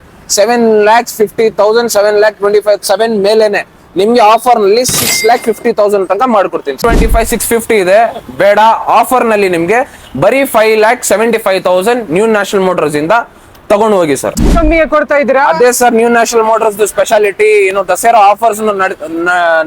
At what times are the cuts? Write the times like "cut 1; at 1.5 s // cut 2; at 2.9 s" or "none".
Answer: cut 1; at 6.8 s // cut 2; at 14.4 s